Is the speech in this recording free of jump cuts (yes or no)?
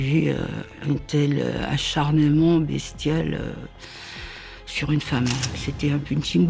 yes